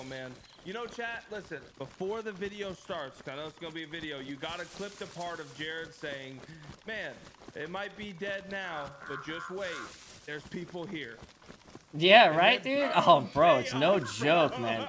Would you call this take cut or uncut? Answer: uncut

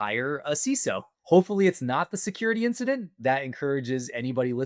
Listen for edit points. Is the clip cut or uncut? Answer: cut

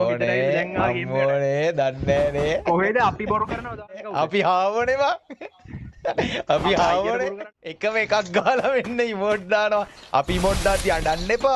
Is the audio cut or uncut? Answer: cut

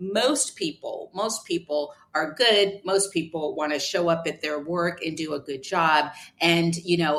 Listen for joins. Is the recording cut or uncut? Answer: uncut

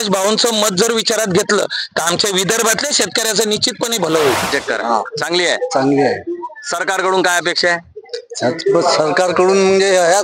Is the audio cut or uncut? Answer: cut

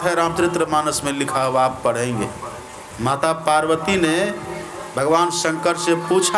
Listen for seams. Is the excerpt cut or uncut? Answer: cut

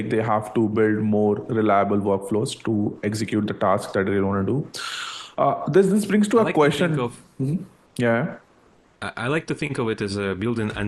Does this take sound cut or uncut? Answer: uncut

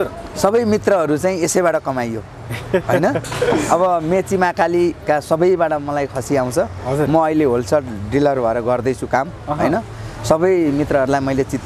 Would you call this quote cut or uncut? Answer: uncut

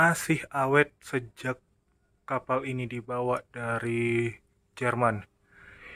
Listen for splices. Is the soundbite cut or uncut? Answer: uncut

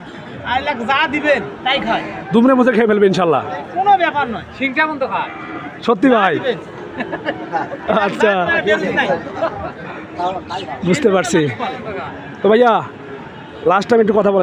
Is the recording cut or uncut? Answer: uncut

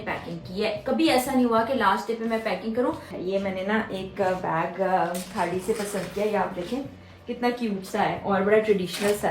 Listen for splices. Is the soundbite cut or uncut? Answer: cut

